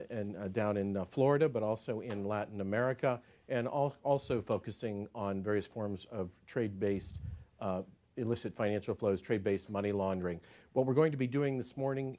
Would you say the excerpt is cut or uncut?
cut